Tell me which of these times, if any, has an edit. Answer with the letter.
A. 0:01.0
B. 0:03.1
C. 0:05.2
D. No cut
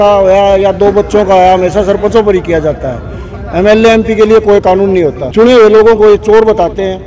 C